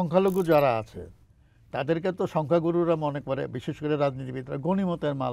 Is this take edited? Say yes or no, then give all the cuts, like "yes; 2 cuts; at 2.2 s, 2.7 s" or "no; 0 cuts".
no; 0 cuts